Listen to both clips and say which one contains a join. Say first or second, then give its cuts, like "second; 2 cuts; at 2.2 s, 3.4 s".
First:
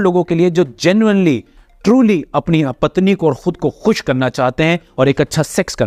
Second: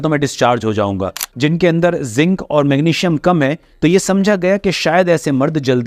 second; 1 cut; at 1.2 s